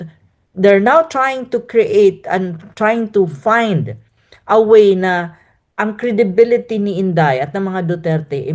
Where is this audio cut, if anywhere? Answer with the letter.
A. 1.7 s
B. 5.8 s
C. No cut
C